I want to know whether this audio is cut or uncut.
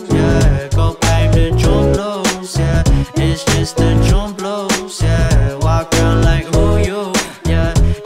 cut